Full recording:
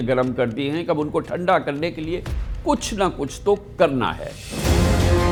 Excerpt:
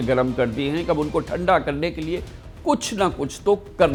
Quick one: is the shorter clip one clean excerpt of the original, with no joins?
yes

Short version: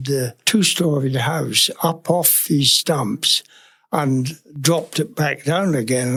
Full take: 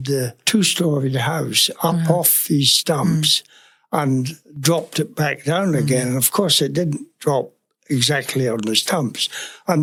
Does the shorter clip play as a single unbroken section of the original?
yes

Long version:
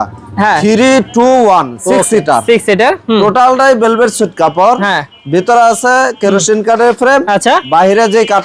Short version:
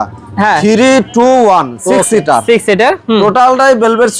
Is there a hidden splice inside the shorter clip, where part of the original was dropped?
no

